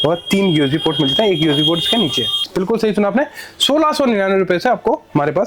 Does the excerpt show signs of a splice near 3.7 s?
no; 1 cut; at 2.3 s

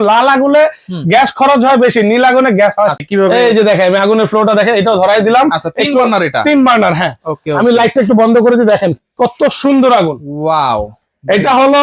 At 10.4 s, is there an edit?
no; 1 cut; at 3.0 s

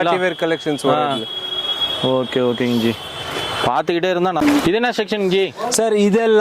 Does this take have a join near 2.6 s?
no; 1 cut; at 4.4 s

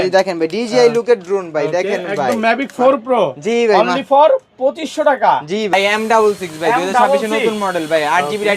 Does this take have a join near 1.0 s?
no; 1 cut; at 5.7 s

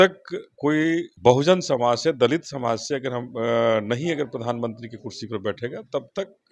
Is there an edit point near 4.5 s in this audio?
no; 1 cut; at 1.1 s

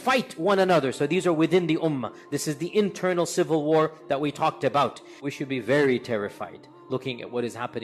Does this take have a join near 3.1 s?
no; 1 cut; at 5.3 s

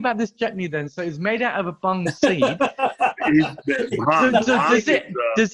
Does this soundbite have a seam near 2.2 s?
no; 0 cuts

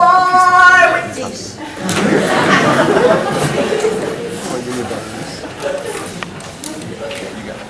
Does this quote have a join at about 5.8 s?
yes; 1 cut; at 5.8 s

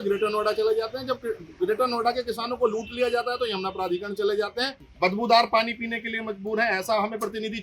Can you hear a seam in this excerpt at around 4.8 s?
yes; 1 cut; at 4.8 s

